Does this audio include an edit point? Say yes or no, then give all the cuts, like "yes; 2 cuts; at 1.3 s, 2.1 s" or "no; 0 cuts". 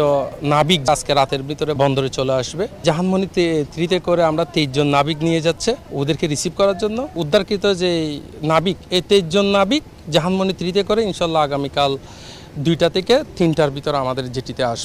yes; 5 cuts; at 0.9 s, 1.8 s, 2.8 s, 5.9 s, 7.2 s